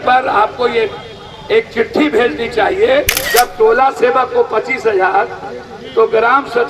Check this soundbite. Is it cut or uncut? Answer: cut